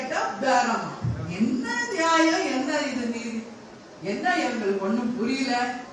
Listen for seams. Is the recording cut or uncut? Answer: uncut